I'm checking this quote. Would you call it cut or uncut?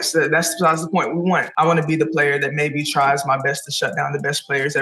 cut